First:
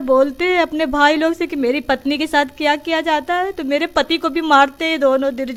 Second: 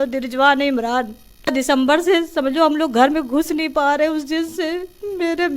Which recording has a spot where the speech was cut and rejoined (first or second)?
second